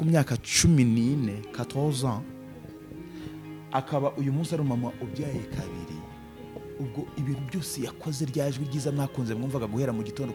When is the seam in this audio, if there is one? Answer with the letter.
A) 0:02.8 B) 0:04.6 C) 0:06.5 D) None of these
D